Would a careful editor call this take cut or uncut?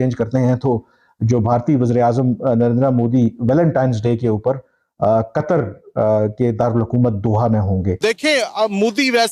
cut